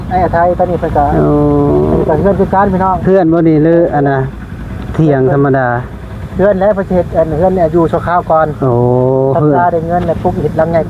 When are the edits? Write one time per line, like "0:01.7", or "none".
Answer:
none

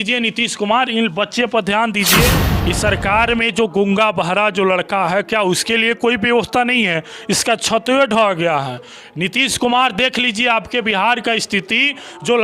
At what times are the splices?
0:02.5

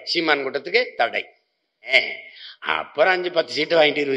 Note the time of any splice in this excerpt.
0:01.9

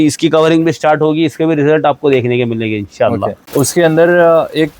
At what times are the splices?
0:03.4

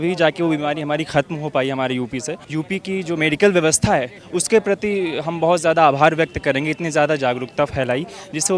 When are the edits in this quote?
none

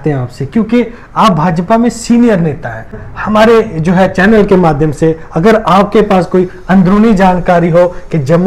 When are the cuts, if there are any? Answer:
0:03.0

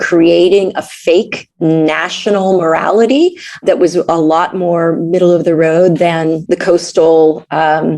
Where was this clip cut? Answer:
0:01.4
0:03.6
0:06.4

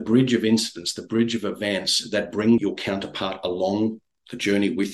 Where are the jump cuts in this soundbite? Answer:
0:02.6

